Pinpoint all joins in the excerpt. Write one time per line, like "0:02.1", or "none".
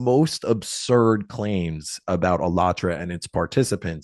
none

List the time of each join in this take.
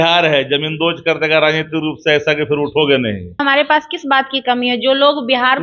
0:03.4

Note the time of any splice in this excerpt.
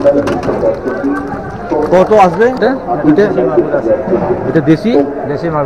0:02.6

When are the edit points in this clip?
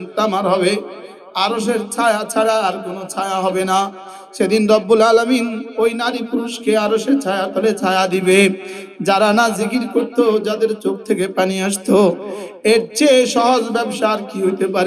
none

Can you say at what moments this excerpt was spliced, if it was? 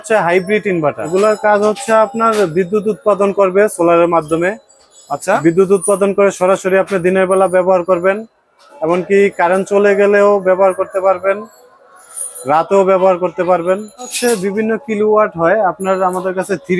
0:01.0
0:14.1

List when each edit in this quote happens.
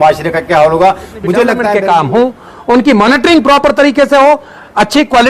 0:01.2

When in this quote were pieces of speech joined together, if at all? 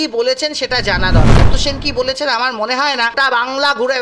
0:01.4
0:03.2

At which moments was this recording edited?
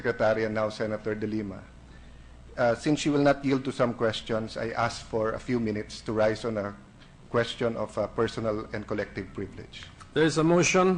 0:01.7

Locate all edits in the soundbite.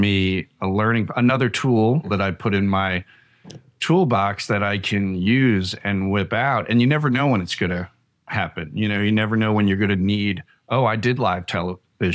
0:02.1

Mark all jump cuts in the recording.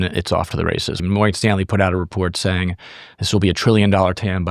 0:01.0

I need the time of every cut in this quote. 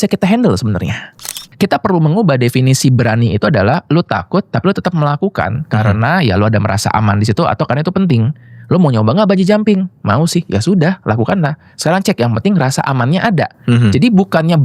0:01.4

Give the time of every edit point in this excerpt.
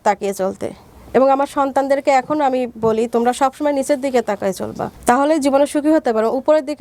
none

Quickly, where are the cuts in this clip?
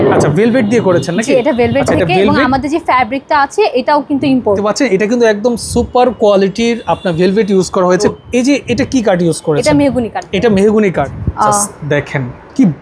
0:04.6
0:08.1
0:11.1

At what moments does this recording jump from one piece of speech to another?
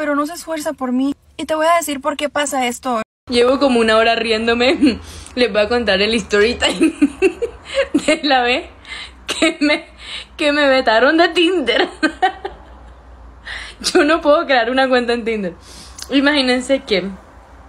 0:03.5

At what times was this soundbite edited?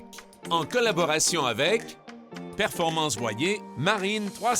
0:03.7

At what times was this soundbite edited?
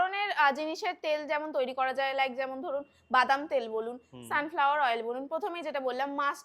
none

